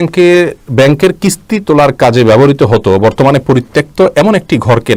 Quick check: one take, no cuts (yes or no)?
yes